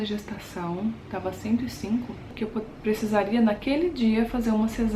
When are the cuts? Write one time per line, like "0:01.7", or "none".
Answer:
0:02.3